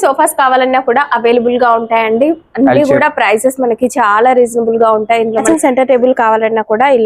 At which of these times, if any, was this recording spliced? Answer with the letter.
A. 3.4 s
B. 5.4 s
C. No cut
B